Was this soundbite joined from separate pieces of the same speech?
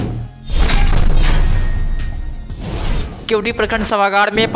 no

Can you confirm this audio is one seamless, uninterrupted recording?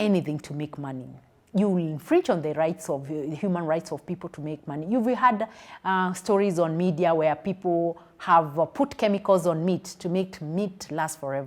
yes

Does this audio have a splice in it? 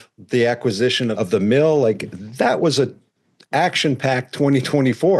yes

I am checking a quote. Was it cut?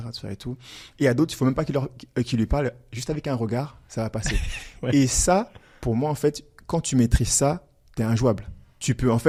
no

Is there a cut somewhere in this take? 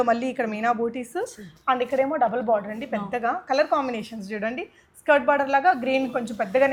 no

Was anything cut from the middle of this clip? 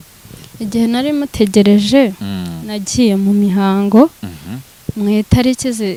no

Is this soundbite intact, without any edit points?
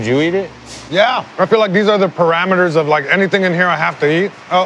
yes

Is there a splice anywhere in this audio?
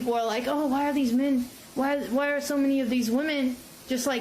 no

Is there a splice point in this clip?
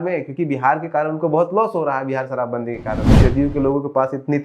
yes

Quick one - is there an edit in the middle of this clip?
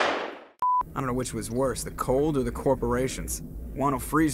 yes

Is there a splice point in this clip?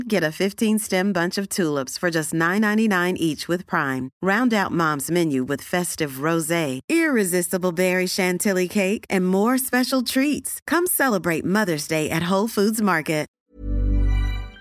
yes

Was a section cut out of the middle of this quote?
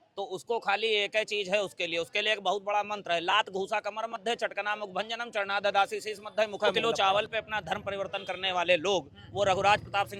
yes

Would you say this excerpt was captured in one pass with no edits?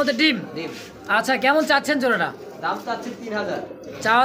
yes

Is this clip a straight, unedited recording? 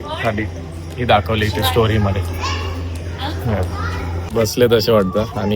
no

